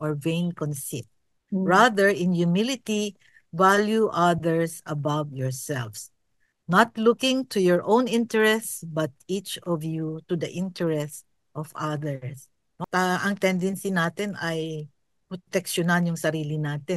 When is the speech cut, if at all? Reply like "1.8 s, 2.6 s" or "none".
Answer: 12.7 s